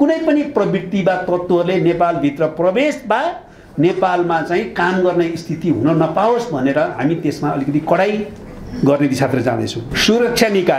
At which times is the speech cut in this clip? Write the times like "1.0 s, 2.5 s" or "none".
9.9 s

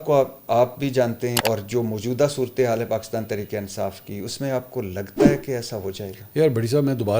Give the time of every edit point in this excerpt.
1.4 s

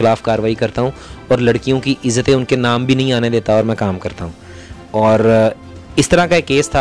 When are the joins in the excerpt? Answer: none

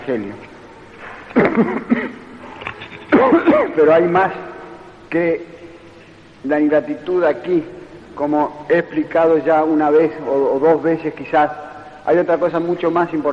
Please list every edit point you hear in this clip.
1.2 s

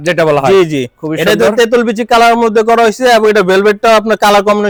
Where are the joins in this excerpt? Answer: none

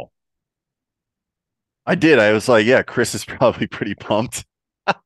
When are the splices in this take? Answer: none

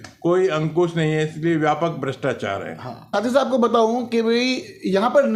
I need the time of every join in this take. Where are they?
3.1 s

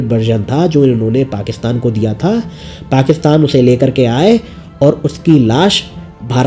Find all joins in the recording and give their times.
none

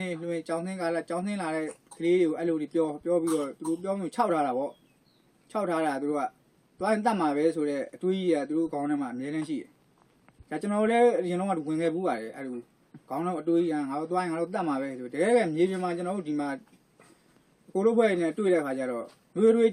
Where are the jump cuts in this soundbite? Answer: none

